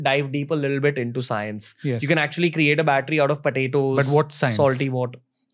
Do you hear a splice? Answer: no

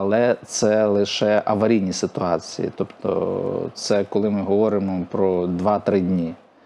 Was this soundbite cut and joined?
no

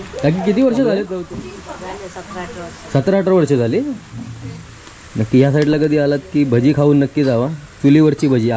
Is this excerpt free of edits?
no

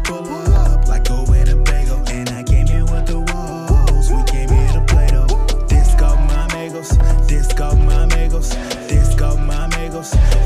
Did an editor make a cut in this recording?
no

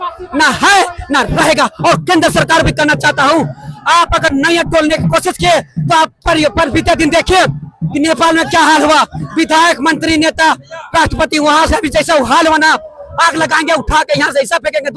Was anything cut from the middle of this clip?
no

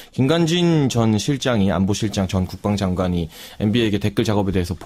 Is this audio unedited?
yes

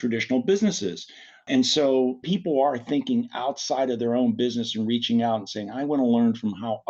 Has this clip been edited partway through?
yes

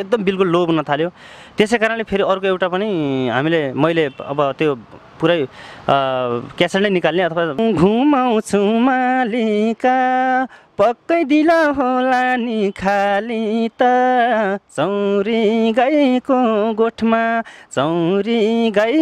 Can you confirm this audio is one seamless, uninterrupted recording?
no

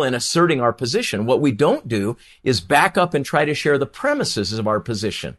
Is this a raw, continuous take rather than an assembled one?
yes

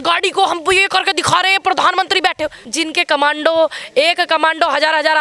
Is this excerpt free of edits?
no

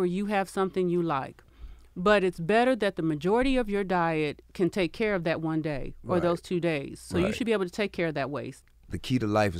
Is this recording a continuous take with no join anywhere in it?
no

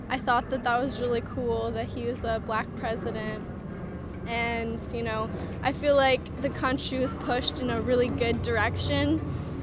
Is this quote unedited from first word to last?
yes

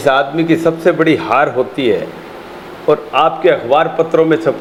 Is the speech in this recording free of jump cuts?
yes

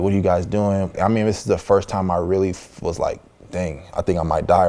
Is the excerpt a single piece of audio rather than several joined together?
no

